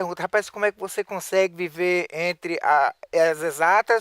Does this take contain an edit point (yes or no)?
yes